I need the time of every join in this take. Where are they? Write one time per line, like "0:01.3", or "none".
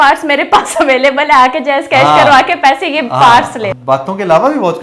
0:03.7